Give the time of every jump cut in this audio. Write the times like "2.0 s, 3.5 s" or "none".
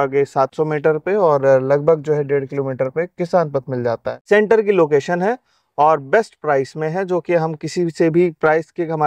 4.1 s